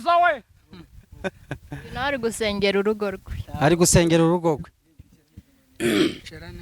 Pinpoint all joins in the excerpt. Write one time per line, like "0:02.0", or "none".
none